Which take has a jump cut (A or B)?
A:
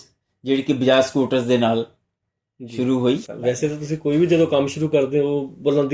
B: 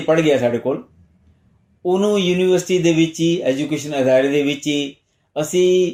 A